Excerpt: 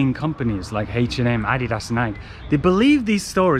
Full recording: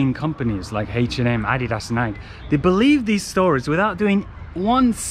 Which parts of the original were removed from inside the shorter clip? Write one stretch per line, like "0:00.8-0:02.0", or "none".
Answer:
none